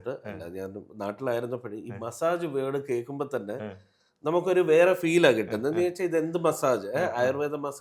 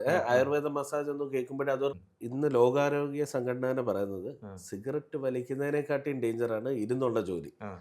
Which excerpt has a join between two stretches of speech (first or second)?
second